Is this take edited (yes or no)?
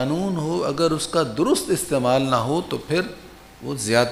no